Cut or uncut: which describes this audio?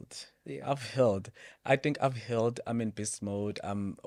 uncut